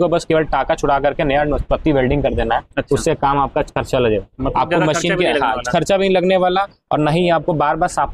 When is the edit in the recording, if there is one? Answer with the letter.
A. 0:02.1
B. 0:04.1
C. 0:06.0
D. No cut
D